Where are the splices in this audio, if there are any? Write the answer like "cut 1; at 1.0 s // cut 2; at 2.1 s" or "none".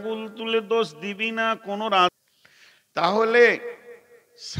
cut 1; at 2.2 s